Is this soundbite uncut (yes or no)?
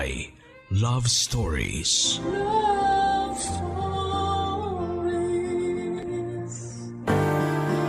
no